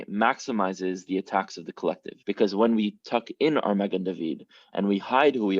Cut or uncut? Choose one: cut